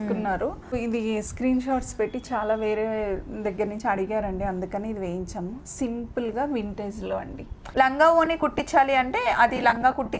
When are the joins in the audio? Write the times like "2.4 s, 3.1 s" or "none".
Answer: 0.8 s, 7.6 s